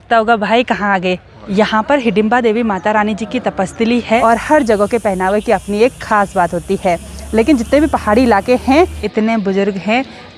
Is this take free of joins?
no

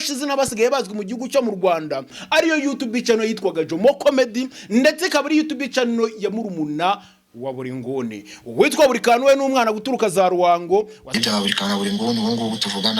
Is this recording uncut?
no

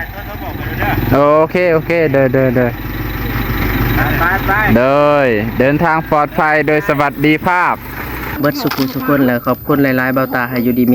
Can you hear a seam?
yes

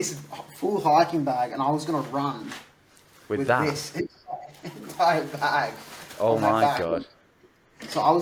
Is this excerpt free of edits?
yes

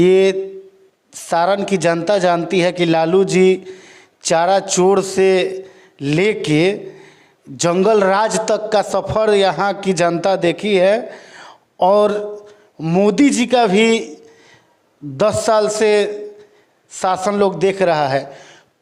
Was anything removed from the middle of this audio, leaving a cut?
no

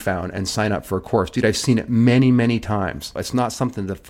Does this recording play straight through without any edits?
no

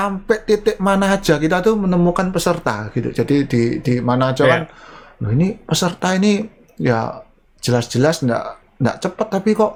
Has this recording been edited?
no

